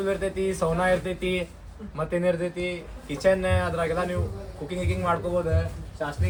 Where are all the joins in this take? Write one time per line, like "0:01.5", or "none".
none